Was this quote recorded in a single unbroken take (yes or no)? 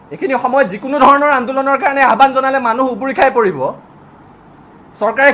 yes